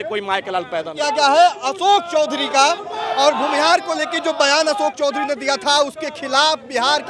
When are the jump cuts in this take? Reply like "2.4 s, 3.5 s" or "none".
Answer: 1.0 s